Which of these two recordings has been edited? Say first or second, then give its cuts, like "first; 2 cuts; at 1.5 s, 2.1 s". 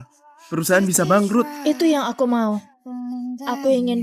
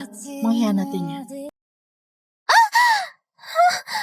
second; 1 cut; at 1.7 s